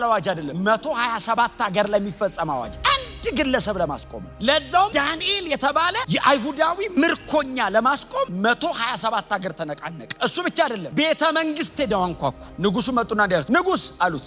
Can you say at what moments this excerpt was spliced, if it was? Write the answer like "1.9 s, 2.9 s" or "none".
none